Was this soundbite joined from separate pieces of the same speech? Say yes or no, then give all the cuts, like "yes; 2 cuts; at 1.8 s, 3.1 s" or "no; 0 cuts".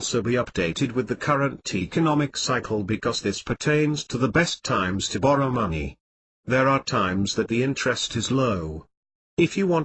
no; 0 cuts